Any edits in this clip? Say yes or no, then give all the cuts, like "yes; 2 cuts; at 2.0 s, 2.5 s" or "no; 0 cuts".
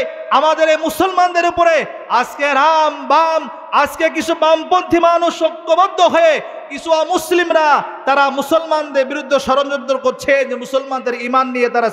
no; 0 cuts